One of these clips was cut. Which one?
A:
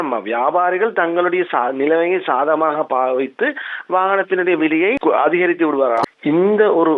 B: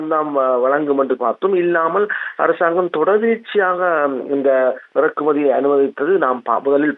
A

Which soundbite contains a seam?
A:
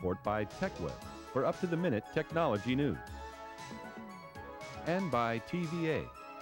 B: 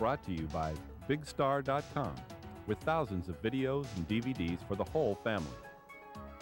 B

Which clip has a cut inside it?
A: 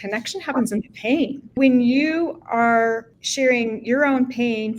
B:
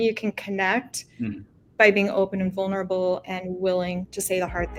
A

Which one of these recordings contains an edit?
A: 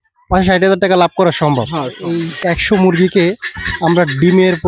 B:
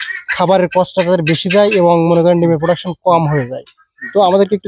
A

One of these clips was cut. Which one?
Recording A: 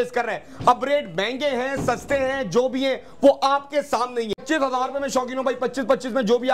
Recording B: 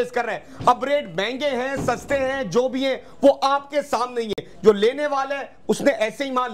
A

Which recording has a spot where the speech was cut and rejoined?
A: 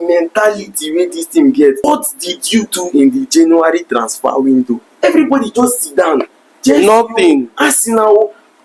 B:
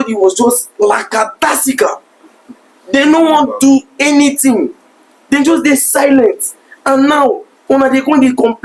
A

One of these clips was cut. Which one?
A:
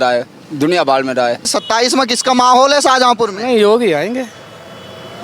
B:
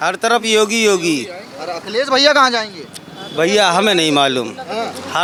A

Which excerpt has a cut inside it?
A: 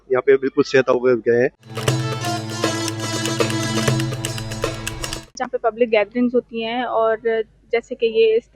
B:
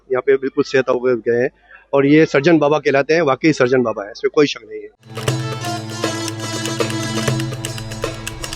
A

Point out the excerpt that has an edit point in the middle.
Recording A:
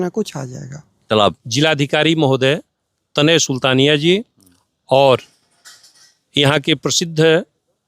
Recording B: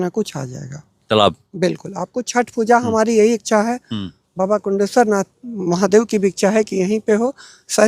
A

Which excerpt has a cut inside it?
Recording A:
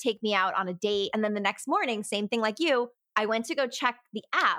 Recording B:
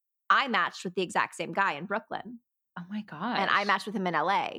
A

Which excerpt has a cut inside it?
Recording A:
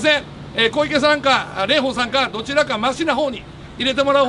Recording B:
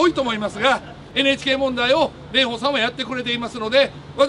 B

